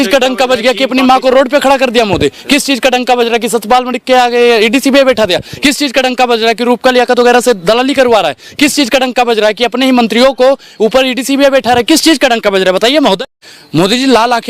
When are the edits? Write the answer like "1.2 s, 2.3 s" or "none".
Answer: 13.2 s